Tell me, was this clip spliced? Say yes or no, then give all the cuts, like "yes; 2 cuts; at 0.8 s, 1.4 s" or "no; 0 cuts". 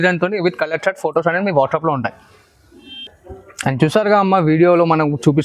no; 0 cuts